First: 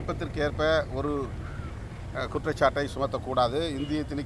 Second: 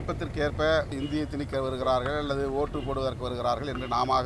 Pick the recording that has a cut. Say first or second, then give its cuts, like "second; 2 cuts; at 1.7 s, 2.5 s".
second; 1 cut; at 0.9 s